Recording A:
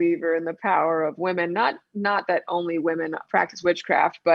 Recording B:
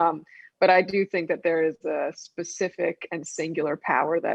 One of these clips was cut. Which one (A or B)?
A